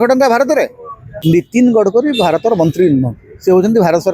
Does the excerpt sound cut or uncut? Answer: cut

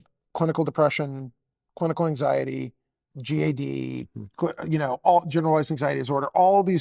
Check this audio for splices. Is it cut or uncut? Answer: uncut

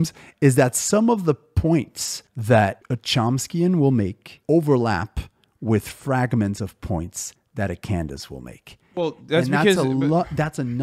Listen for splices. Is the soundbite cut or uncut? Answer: uncut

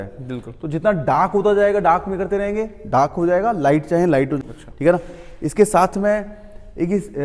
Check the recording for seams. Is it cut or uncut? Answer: cut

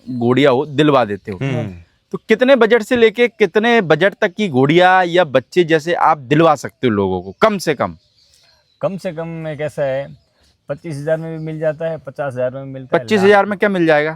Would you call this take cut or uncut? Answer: uncut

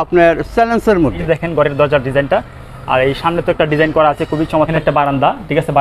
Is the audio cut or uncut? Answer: cut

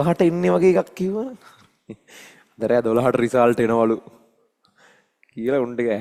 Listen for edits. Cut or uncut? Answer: uncut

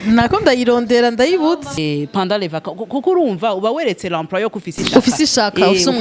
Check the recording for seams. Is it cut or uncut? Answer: cut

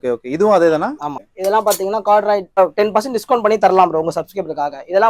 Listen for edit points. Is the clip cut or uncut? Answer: cut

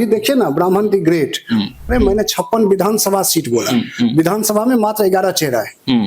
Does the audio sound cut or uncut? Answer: cut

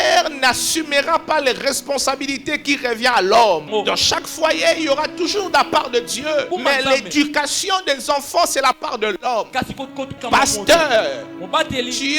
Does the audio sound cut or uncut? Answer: cut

